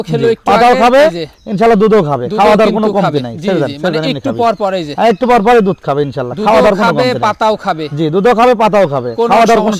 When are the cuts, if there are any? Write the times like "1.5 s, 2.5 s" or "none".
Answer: none